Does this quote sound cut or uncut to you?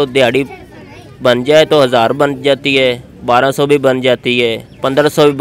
uncut